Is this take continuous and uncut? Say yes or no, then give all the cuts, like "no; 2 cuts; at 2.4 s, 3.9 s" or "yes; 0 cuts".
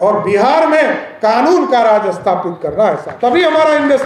yes; 0 cuts